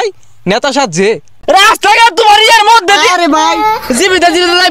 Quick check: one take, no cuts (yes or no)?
no